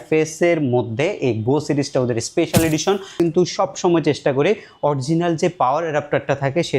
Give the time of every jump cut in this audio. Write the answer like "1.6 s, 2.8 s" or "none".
3.1 s